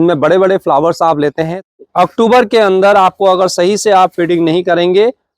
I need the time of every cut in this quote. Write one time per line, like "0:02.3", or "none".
0:01.5

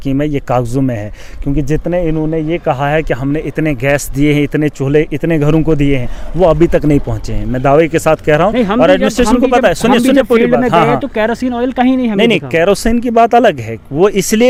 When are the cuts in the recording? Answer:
none

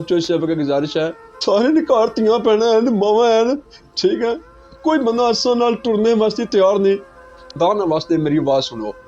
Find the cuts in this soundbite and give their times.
0:01.3
0:07.4

